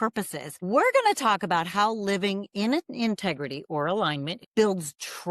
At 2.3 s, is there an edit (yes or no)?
no